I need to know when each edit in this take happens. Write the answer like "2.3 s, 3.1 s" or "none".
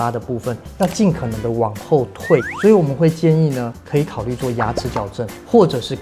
none